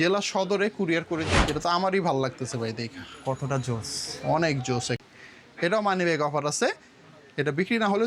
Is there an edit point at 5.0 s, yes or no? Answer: yes